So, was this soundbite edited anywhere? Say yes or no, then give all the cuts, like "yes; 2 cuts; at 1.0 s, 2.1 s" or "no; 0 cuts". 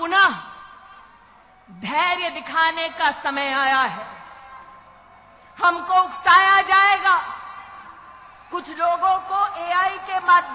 no; 0 cuts